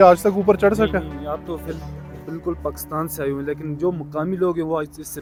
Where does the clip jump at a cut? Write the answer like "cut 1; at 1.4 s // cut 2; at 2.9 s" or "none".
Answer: none